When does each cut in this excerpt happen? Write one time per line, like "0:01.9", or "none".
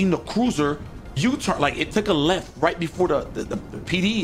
none